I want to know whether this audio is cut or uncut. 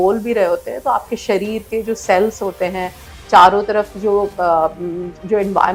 uncut